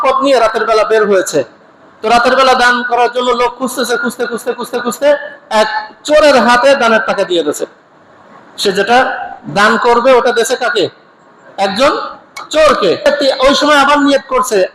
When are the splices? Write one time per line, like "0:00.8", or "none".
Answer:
0:13.1